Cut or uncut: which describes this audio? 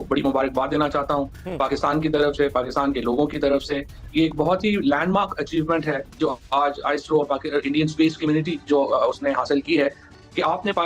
uncut